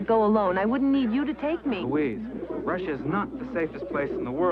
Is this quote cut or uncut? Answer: uncut